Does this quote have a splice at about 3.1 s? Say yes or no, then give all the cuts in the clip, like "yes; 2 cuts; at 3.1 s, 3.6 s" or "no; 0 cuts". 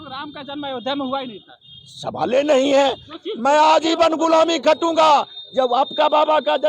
yes; 1 cut; at 3.1 s